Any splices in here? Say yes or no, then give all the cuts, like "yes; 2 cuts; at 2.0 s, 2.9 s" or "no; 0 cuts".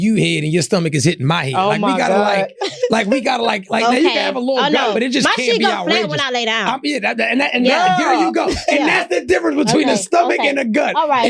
no; 0 cuts